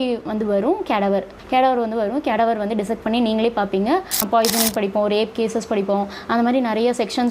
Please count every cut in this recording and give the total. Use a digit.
2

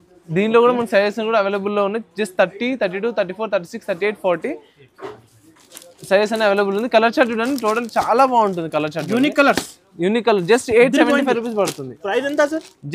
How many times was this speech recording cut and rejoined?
0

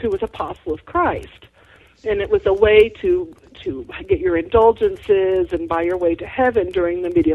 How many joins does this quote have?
1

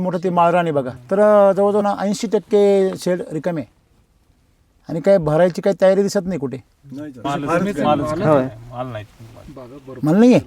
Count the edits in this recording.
3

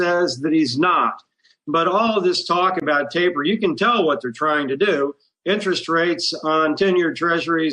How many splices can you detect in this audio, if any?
0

